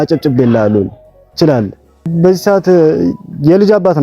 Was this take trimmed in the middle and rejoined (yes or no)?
yes